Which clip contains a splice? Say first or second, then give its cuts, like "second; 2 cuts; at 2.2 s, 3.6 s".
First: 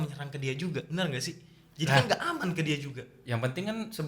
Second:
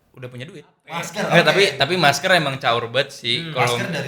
second; 1 cut; at 1.1 s